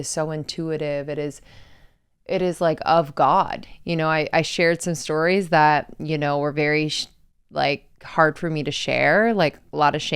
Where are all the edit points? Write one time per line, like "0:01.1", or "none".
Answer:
0:03.7